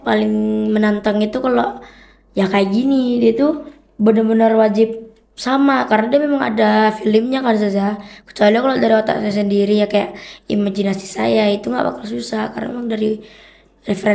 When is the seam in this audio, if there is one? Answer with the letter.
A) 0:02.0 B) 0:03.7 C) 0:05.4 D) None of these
D